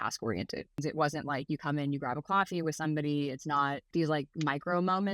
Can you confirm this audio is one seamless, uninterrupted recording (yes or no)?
no